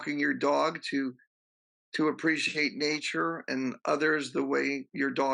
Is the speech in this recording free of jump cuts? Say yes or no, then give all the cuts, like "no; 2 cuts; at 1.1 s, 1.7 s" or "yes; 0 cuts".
yes; 0 cuts